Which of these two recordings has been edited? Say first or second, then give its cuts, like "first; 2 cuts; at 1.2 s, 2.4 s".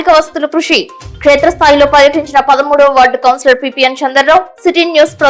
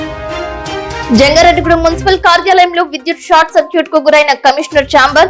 second; 1 cut; at 1.1 s